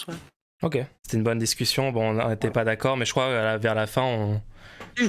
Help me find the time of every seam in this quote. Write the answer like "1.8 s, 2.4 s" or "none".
1.0 s